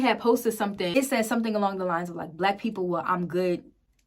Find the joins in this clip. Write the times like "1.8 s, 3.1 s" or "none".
0.9 s